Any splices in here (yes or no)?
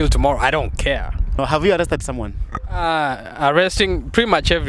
yes